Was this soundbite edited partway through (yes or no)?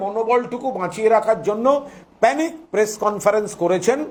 no